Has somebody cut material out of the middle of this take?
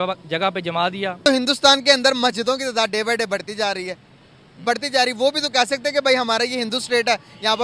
yes; 1 cut; at 1.3 s

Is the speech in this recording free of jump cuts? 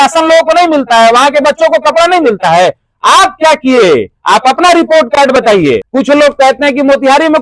no; 1 cut; at 5.8 s

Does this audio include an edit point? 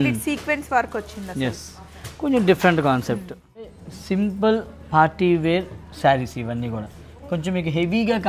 yes; 1 cut; at 3.9 s

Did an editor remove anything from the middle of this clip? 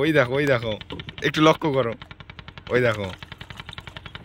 no; 0 cuts

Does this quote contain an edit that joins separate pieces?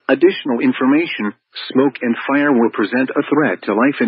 no; 0 cuts

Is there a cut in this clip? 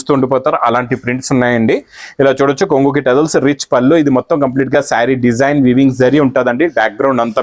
no; 0 cuts

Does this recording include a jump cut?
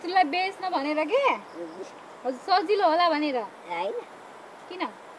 no; 0 cuts

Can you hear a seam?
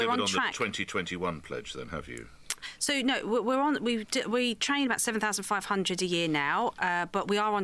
no; 0 cuts

